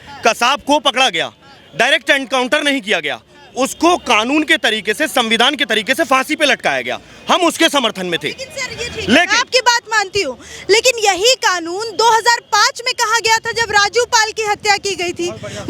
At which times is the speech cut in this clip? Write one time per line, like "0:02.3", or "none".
none